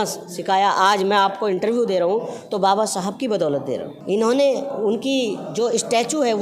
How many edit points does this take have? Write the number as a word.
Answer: one